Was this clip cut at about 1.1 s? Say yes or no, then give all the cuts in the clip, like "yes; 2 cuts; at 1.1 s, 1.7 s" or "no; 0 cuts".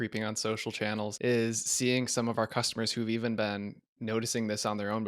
yes; 1 cut; at 1.1 s